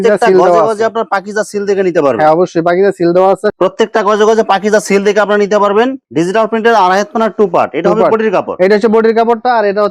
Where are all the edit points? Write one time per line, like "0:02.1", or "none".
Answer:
none